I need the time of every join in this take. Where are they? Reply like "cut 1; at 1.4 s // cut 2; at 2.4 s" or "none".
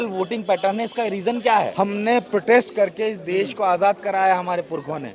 cut 1; at 1.7 s